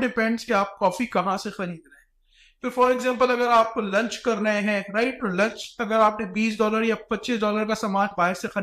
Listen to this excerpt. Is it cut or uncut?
uncut